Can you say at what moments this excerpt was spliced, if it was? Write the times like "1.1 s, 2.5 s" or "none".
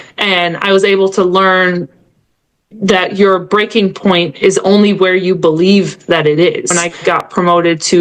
6.8 s